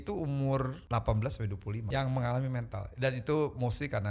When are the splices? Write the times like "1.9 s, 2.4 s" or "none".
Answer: 0.8 s, 1.9 s